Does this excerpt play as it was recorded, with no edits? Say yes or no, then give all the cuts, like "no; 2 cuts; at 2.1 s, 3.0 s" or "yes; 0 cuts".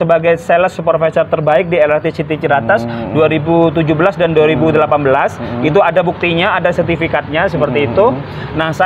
yes; 0 cuts